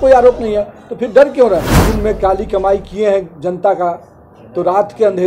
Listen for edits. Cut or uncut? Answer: cut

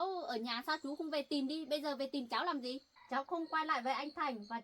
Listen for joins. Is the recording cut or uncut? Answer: cut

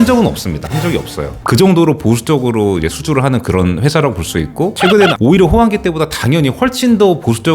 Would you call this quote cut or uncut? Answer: cut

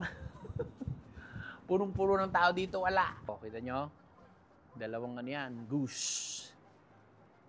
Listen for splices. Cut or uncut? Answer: cut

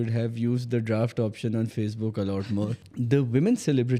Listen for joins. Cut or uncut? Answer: cut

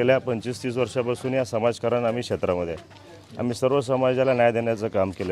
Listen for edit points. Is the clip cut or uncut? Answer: uncut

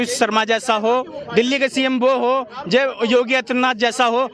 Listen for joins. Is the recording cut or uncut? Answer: uncut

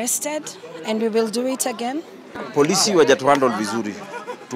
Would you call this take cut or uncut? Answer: cut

